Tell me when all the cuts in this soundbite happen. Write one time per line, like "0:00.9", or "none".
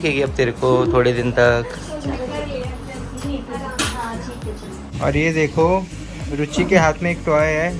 0:04.8